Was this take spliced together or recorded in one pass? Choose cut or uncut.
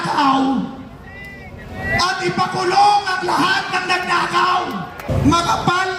cut